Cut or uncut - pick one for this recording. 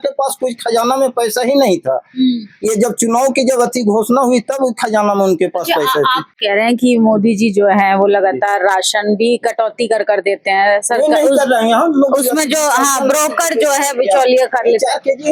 uncut